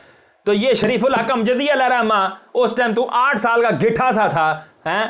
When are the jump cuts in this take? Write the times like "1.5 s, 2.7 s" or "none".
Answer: none